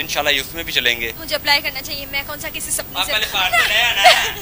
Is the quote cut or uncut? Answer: uncut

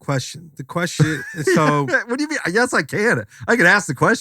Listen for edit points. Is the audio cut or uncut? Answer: uncut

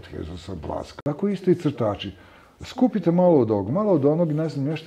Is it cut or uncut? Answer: cut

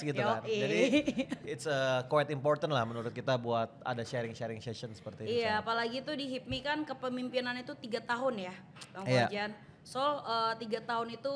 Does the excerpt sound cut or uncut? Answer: uncut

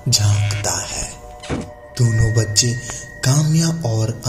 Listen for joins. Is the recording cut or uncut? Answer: uncut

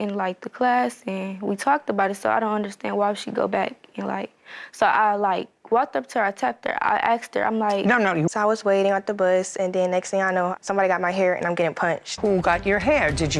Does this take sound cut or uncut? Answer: cut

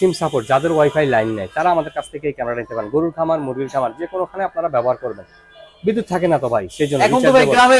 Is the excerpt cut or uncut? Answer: uncut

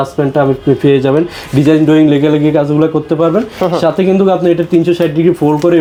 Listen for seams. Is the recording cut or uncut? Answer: uncut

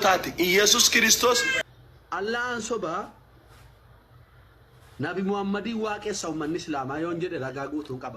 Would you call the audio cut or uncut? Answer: cut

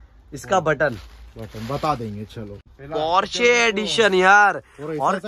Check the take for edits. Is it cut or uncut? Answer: cut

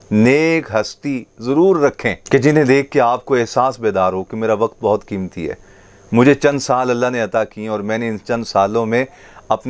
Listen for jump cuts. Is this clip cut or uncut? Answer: uncut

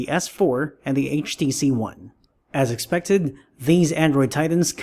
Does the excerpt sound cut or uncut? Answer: uncut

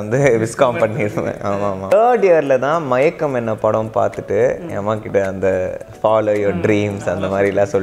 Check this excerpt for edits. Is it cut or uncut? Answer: cut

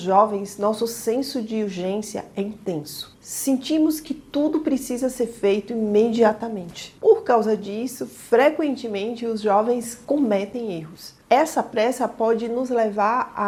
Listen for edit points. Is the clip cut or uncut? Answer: uncut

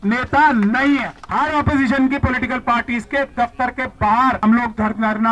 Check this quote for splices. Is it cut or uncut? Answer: cut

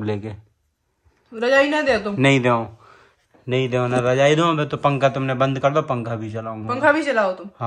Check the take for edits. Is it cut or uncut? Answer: uncut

